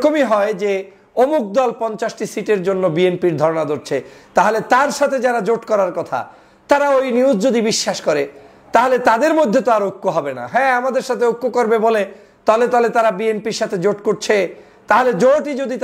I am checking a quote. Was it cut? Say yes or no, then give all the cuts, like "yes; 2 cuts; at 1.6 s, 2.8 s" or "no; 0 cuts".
no; 0 cuts